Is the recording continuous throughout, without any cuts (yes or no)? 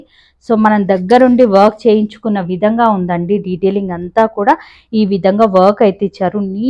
yes